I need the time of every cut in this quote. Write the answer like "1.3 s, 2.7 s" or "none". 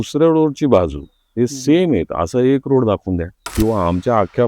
3.4 s